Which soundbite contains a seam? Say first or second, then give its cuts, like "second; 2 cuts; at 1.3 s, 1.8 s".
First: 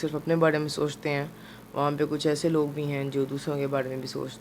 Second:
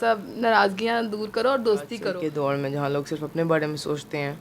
second; 1 cut; at 2.1 s